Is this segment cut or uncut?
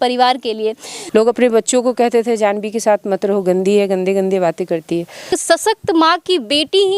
cut